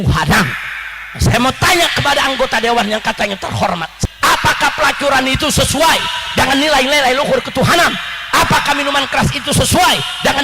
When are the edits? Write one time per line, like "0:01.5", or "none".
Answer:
0:03.9